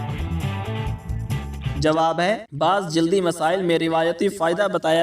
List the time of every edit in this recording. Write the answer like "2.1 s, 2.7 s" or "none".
1.6 s